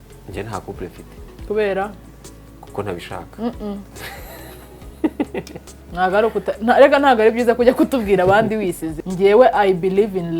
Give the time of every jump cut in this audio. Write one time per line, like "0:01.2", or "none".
0:08.9

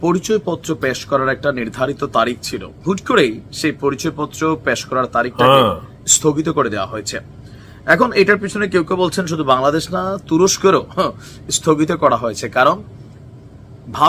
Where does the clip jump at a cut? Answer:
none

